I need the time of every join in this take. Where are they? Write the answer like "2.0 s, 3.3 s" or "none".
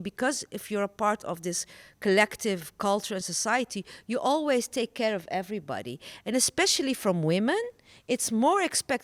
none